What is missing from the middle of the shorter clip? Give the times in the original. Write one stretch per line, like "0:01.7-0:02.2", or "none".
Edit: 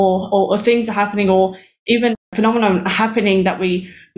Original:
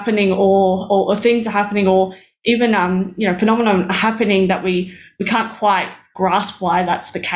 0:02.8-0:03.2